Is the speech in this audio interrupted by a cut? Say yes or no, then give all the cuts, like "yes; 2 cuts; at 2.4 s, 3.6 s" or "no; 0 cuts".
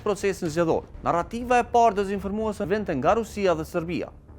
yes; 2 cuts; at 0.9 s, 2.7 s